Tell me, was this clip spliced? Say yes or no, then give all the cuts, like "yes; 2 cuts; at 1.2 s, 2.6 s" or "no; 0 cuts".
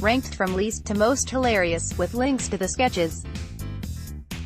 yes; 1 cut; at 3.2 s